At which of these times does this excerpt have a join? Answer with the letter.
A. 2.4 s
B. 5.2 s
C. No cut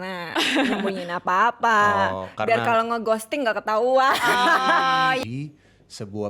B